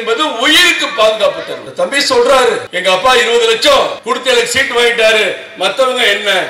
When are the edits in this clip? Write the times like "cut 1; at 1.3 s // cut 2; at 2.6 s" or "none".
cut 1; at 1.6 s // cut 2; at 2.7 s // cut 3; at 4.0 s